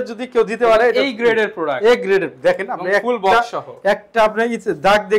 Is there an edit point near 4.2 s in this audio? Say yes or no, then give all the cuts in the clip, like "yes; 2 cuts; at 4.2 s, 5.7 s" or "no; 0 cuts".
no; 0 cuts